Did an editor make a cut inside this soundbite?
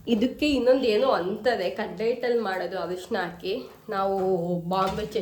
no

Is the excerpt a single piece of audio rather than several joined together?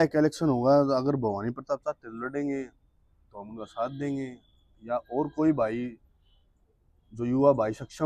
yes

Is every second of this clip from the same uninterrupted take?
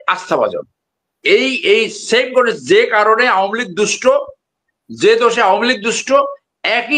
yes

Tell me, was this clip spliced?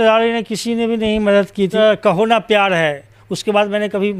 yes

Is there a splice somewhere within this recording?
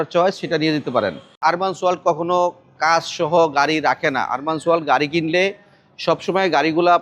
yes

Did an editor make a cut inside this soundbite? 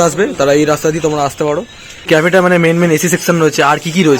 yes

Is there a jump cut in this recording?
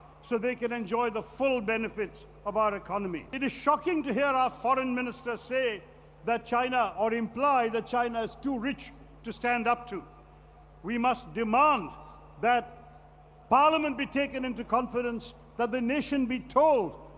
yes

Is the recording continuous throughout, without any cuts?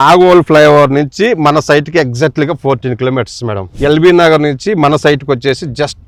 yes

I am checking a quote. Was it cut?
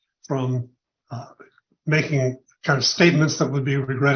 no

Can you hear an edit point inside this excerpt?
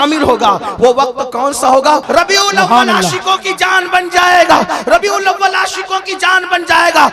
yes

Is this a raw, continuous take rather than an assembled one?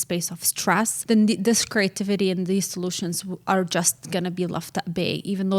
no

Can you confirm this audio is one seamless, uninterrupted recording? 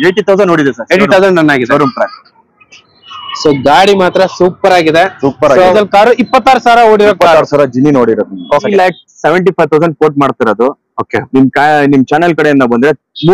no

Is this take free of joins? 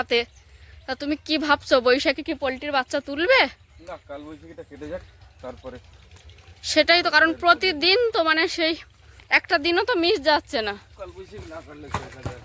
yes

